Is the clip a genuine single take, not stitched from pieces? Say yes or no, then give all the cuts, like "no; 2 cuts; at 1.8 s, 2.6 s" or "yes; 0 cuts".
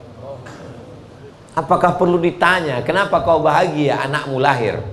no; 1 cut; at 1.3 s